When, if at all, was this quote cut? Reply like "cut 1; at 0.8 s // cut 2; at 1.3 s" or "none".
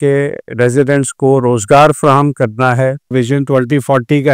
cut 1; at 3.1 s